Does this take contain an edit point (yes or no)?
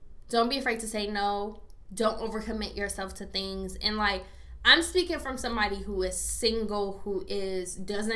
no